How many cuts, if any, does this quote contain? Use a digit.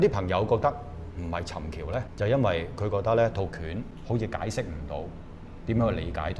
2